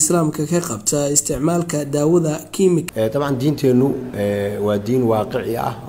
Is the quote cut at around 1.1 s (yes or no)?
no